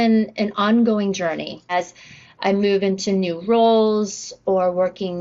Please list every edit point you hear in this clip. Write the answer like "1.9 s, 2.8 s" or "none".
1.7 s